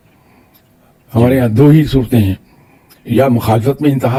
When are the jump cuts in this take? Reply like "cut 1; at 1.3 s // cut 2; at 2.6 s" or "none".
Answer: none